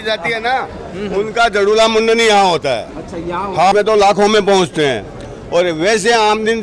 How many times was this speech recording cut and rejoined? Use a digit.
1